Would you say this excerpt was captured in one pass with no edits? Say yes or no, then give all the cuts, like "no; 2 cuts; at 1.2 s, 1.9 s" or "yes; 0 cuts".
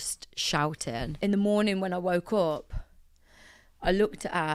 no; 1 cut; at 1.1 s